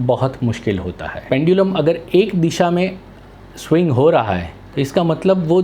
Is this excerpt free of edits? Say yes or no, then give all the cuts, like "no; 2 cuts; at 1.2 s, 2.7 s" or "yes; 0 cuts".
no; 2 cuts; at 1.2 s, 4.6 s